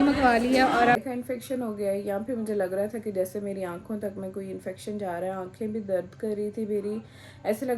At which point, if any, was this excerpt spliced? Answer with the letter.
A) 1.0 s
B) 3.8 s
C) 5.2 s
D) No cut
A